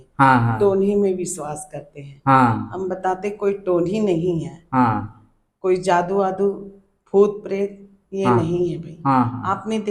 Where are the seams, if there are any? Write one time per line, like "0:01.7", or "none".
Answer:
none